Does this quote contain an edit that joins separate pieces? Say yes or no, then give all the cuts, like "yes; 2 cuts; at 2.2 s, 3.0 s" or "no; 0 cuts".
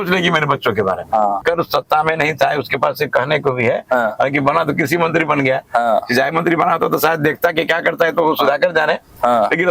yes; 1 cut; at 1.4 s